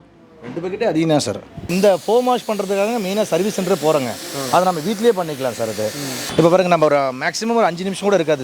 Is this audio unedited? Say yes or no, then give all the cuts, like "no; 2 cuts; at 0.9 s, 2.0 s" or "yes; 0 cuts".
no; 2 cuts; at 1.7 s, 6.2 s